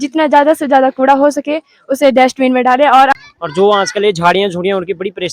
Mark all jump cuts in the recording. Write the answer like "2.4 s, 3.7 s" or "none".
3.2 s